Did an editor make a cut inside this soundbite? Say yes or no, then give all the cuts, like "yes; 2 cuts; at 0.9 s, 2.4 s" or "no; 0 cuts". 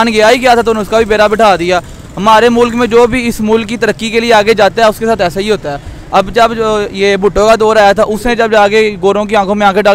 no; 0 cuts